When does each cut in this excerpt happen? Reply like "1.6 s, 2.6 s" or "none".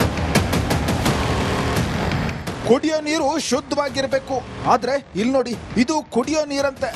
2.1 s